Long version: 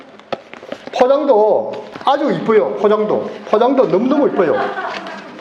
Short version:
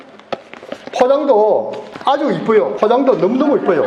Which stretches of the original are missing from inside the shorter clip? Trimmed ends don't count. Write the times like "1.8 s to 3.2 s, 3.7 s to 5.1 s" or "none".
2.7 s to 3.4 s

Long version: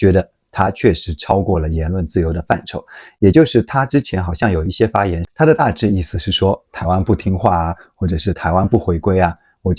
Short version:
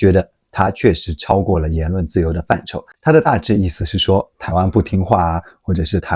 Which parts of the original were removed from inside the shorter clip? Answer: 2.9 s to 5.3 s

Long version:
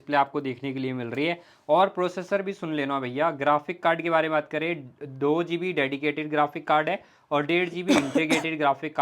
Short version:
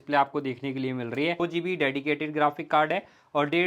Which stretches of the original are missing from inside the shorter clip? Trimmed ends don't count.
1.4 s to 5.4 s

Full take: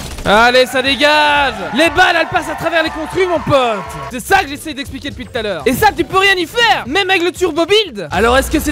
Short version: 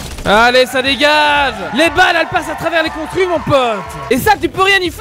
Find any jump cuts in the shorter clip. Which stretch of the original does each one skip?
4.0 s to 5.6 s

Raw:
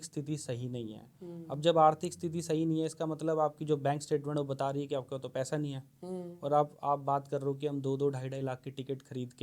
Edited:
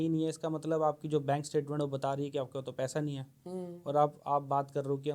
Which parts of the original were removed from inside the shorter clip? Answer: none

